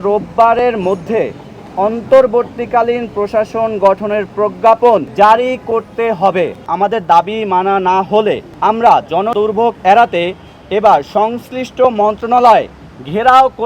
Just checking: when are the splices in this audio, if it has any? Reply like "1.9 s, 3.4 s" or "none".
5.1 s, 6.7 s, 8.5 s, 9.3 s